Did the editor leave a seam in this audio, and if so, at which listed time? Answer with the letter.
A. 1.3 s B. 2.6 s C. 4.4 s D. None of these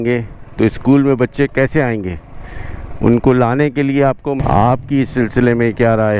C